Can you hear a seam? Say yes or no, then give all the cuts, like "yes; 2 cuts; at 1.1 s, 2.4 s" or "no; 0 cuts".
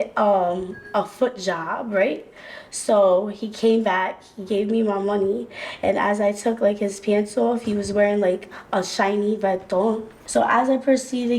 yes; 1 cut; at 10.1 s